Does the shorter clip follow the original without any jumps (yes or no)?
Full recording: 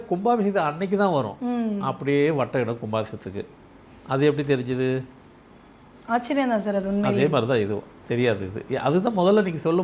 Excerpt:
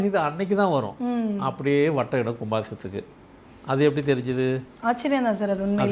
no